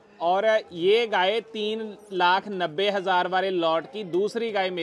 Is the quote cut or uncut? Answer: uncut